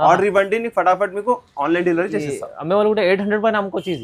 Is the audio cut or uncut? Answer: uncut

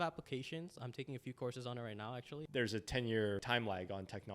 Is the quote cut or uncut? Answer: cut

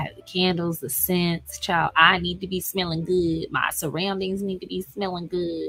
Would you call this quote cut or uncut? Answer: uncut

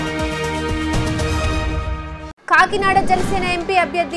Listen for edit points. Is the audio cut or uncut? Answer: cut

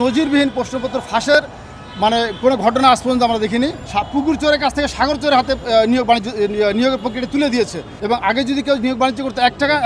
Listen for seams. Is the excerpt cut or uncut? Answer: cut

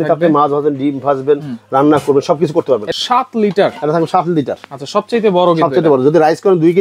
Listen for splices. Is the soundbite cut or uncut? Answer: cut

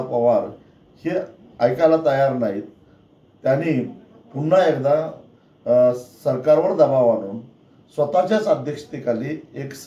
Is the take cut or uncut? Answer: uncut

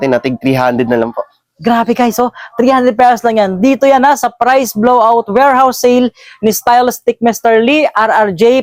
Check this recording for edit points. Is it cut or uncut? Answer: uncut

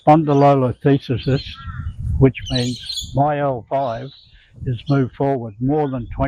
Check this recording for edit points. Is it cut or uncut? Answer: uncut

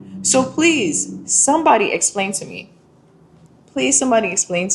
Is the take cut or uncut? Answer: uncut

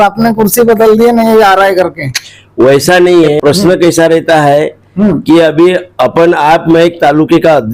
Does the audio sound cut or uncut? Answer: uncut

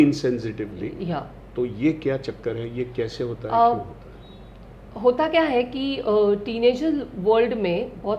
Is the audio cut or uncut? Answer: uncut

